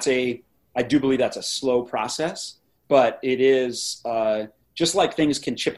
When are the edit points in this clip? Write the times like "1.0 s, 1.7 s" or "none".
2.8 s